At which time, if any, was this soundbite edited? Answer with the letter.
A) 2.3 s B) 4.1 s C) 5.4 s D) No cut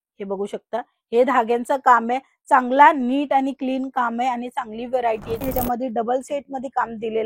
C